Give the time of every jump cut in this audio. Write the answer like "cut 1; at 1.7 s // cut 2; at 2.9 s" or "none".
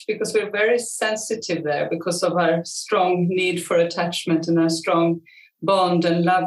none